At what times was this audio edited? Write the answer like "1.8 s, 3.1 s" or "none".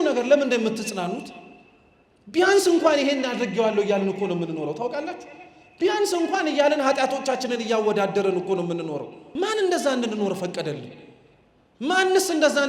9.2 s